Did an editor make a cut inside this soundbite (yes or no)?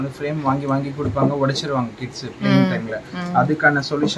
no